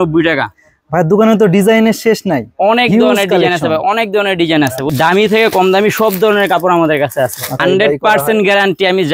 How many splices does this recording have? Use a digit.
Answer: 2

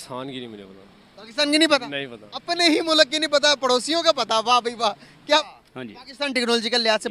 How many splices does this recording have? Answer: 1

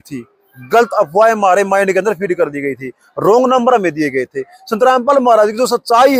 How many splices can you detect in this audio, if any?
0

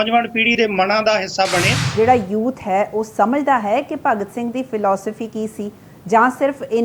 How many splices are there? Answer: 1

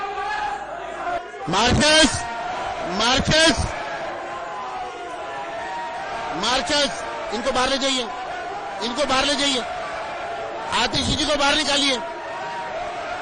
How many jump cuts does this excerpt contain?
1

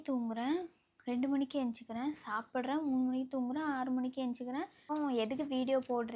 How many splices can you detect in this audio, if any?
1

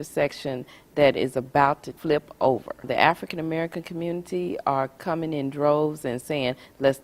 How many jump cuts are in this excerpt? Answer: 2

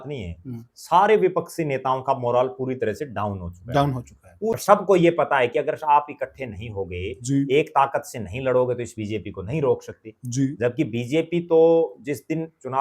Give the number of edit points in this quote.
1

